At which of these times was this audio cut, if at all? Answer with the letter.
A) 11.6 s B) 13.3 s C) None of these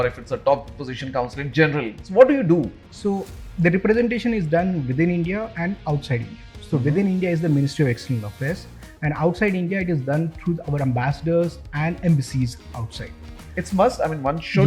B